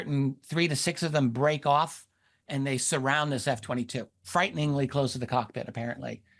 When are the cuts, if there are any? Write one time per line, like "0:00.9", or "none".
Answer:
0:04.1